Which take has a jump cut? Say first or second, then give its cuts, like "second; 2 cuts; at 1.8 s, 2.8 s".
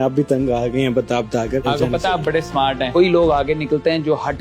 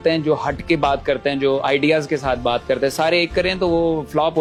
first; 2 cuts; at 1.7 s, 2.9 s